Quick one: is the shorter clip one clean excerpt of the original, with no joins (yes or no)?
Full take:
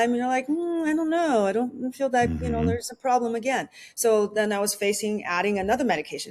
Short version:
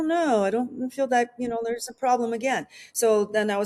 yes